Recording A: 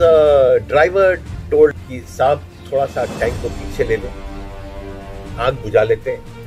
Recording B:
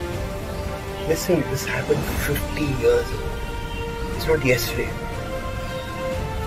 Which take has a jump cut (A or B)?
A